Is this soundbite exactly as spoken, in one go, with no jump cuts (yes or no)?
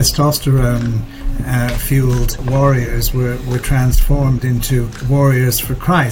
no